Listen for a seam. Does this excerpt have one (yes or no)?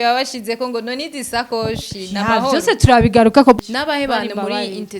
yes